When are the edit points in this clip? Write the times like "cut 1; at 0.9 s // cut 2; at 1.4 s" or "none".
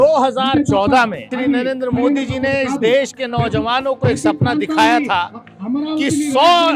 cut 1; at 1.3 s